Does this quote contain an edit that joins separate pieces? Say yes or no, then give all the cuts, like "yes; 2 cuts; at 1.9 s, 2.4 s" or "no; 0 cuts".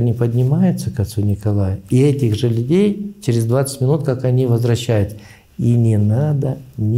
no; 0 cuts